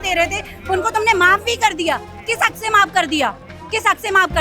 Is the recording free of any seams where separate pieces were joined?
yes; 0 cuts

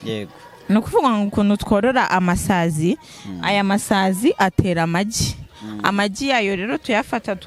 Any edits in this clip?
no; 0 cuts

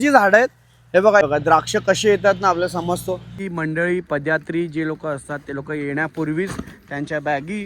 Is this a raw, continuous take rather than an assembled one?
no; 2 cuts; at 1.2 s, 3.3 s

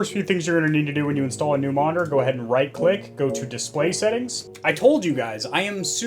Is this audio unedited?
no; 1 cut; at 4.4 s

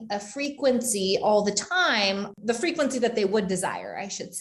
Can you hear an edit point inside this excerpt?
yes; 1 cut; at 2.3 s

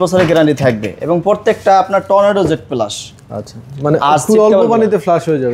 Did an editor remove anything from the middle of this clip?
no; 0 cuts

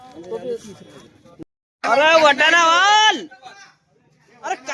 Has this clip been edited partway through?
yes; 1 cut; at 1.2 s

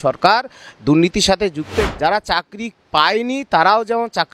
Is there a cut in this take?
yes; 1 cut; at 1.9 s

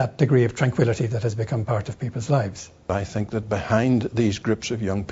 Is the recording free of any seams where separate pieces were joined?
no; 1 cut; at 2.9 s

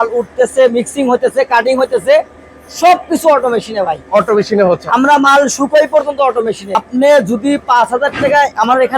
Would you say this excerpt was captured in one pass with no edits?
no; 1 cut; at 6.8 s

